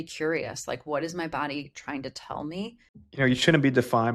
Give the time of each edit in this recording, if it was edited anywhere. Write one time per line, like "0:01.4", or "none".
0:02.9